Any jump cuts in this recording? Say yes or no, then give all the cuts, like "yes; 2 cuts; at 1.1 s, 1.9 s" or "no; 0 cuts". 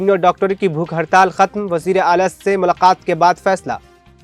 no; 0 cuts